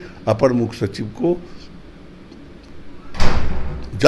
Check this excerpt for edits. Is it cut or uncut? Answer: uncut